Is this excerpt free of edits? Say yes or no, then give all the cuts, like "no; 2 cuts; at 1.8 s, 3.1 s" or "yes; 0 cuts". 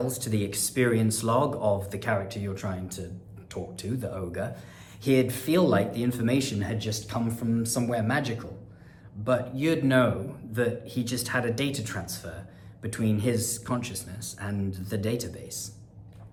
yes; 0 cuts